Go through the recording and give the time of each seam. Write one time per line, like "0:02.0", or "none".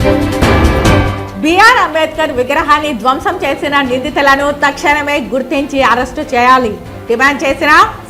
0:01.2

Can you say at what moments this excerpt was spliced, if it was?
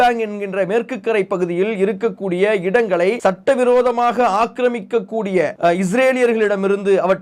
0:03.2
0:05.5

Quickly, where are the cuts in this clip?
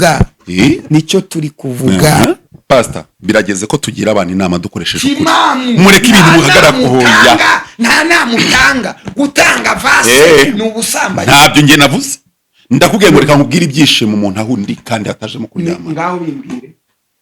0:02.5

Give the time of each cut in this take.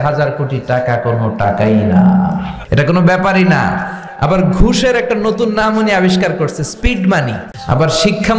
0:02.5
0:07.5

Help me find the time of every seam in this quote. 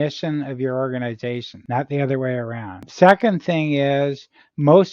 0:01.5
0:02.9

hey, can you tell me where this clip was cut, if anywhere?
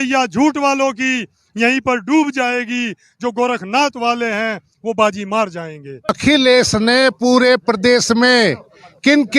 0:06.1

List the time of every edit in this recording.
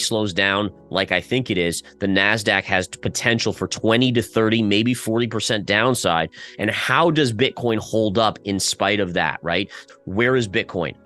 0:09.8

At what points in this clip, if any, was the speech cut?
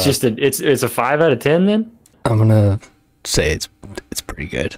0:02.0

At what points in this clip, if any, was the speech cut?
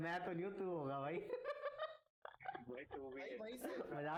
none

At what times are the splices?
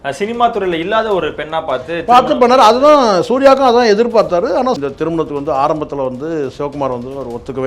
0:04.8

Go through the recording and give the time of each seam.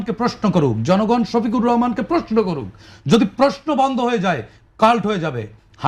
none

